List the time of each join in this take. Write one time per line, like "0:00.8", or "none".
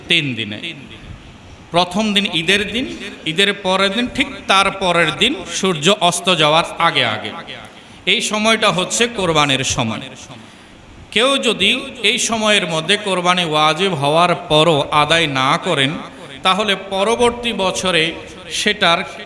none